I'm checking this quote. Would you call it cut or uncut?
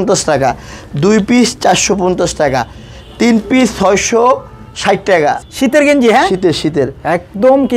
uncut